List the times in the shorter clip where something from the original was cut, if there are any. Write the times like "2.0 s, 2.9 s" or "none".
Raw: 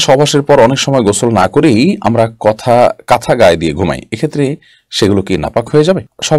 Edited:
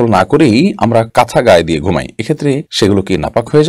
1.1 s, 2.7 s

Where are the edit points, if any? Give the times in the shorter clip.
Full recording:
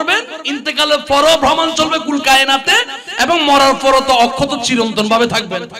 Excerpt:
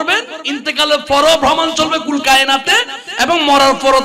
none

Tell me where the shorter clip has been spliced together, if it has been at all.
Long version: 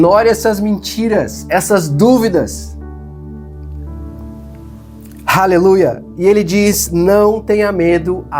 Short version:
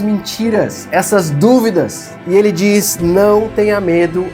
2.1 s

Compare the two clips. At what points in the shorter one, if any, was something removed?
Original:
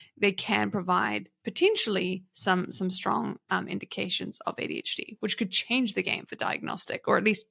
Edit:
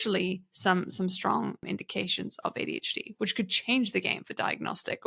1.6 s

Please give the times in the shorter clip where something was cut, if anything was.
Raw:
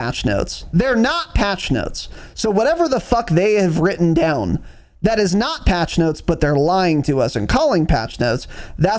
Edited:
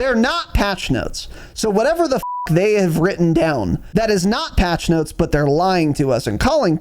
3.8 s

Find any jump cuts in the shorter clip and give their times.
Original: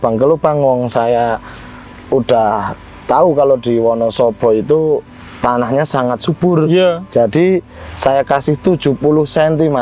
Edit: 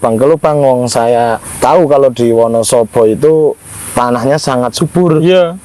1.4 s

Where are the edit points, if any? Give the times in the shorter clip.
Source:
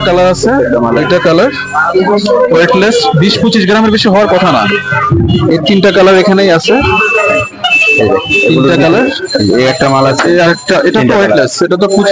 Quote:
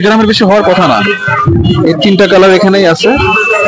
none

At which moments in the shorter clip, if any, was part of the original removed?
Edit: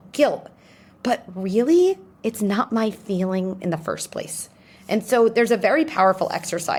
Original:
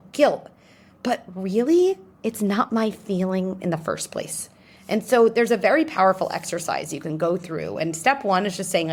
none

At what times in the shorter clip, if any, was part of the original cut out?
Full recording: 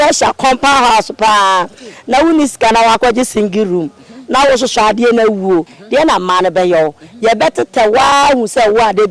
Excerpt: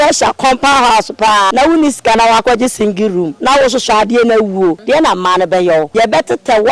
1.5 s, 3.3 s, 4.8 s, 5.9 s

